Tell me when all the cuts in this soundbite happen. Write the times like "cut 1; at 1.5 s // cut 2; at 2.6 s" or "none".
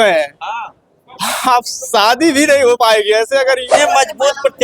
cut 1; at 3.7 s

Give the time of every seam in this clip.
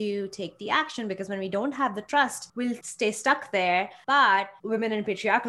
cut 1; at 2.7 s // cut 2; at 4.0 s // cut 3; at 4.6 s

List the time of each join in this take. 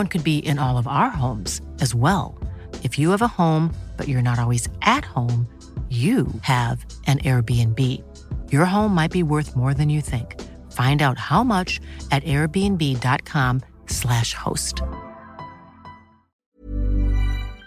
cut 1; at 16.4 s

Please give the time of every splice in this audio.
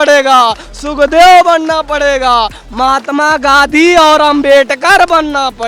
none

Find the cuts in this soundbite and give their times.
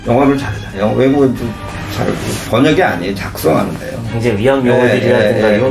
cut 1; at 0.8 s // cut 2; at 2.4 s // cut 3; at 4.1 s

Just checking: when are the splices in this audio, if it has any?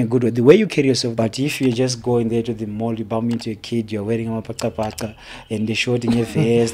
cut 1; at 1.1 s

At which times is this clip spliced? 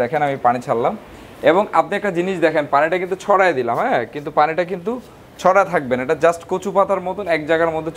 none

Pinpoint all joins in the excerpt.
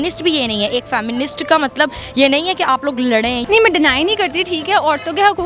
cut 1; at 3.4 s

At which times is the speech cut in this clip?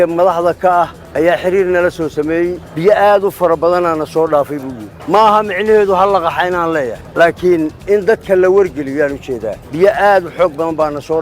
cut 1; at 9.6 s

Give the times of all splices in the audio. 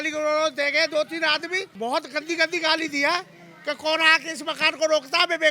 cut 1; at 1.6 s

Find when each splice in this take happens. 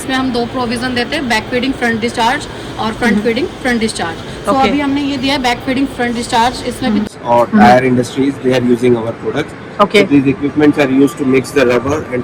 cut 1; at 7.1 s

